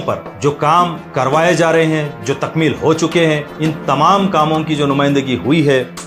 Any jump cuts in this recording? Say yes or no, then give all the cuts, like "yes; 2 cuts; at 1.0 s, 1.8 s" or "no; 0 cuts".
no; 0 cuts